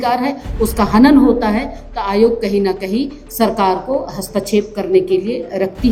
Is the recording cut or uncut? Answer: uncut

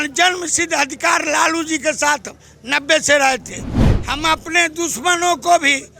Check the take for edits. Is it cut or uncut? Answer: cut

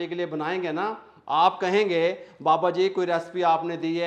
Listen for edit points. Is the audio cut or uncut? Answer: uncut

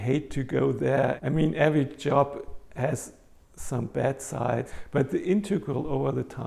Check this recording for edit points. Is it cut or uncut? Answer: cut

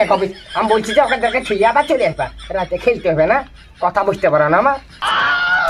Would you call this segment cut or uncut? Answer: cut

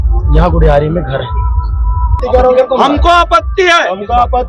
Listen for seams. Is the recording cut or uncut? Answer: cut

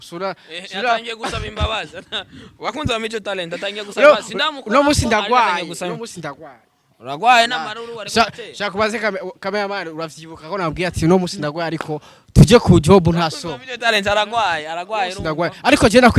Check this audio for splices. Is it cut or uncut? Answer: uncut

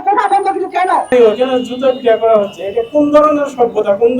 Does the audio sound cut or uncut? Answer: cut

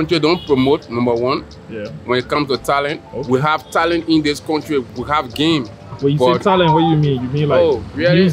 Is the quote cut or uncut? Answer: uncut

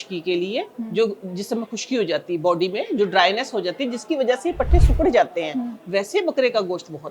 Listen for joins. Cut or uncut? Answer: uncut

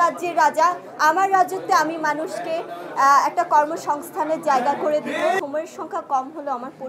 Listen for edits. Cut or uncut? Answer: cut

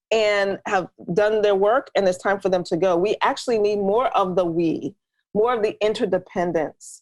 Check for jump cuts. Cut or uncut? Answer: uncut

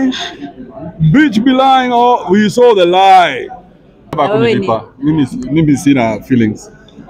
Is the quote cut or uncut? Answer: cut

